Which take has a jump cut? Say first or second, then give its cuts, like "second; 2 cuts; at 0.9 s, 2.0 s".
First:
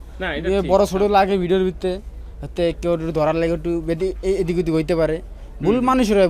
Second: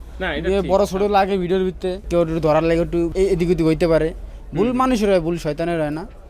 second; 2 cuts; at 2.1 s, 3.1 s